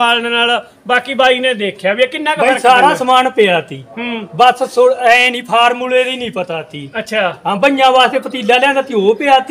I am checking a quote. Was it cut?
no; 0 cuts

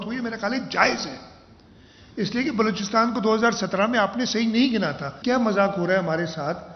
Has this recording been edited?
yes; 1 cut; at 5.2 s

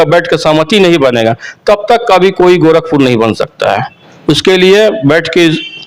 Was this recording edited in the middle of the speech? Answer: no; 0 cuts

